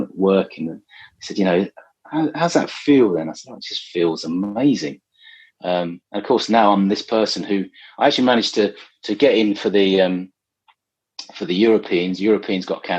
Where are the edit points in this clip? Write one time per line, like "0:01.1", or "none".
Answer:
none